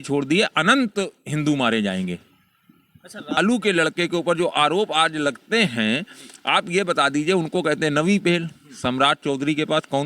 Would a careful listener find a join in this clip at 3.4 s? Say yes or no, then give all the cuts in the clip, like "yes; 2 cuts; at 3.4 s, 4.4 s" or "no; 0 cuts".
yes; 1 cut; at 3.4 s